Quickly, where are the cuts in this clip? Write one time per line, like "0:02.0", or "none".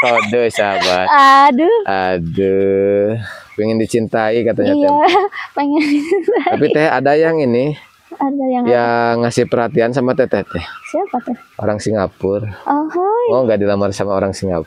none